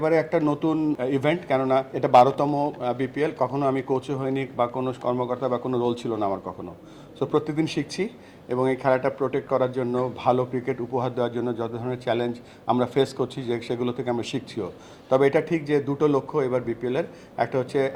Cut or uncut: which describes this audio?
cut